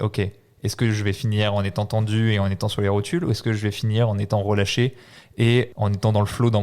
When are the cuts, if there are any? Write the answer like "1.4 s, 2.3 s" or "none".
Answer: 5.7 s

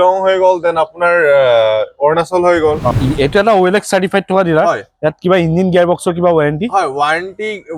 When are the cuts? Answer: 2.9 s

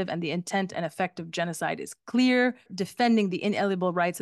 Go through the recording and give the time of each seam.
2.7 s

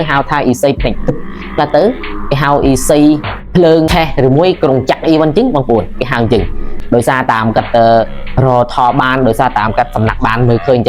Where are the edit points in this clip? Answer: 3.9 s

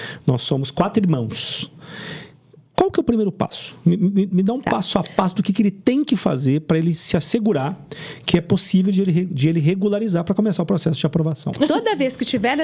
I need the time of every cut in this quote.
11.5 s

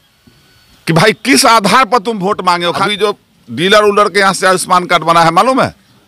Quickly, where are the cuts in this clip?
2.8 s

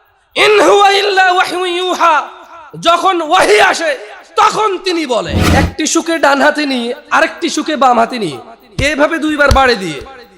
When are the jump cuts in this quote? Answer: 5.4 s

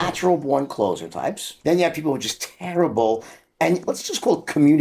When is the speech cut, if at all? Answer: 1.5 s

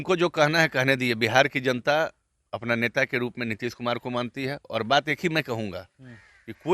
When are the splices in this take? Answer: none

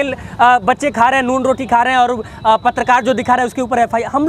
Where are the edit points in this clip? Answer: none

